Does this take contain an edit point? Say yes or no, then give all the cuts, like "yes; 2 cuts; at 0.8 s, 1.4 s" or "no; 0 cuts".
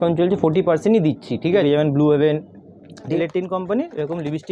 yes; 2 cuts; at 1.6 s, 3.1 s